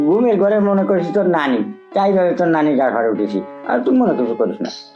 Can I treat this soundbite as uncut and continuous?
yes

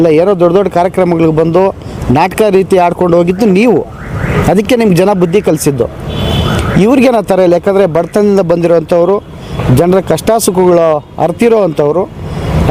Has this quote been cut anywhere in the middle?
no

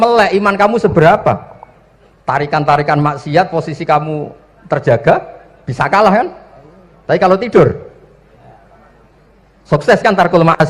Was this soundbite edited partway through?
no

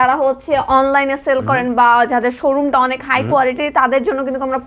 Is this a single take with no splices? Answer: yes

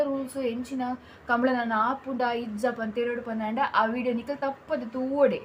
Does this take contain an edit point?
no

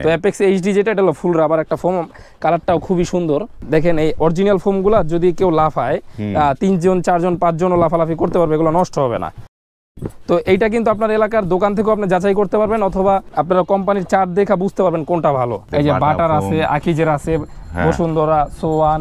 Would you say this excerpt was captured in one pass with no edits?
no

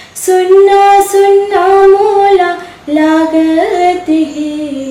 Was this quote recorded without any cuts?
yes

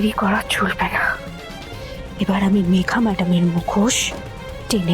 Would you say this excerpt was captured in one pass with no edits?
yes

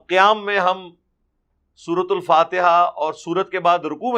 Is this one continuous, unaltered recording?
yes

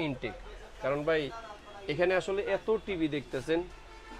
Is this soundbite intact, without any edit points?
yes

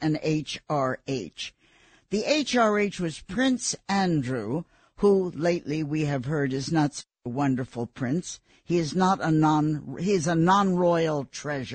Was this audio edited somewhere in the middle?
no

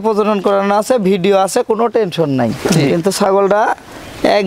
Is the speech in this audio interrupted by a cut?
yes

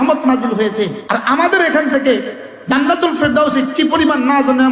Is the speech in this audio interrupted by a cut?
yes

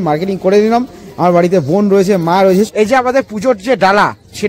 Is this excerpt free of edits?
no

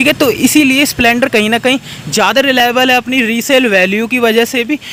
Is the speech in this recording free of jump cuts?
yes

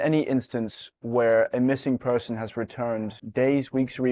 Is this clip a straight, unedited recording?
yes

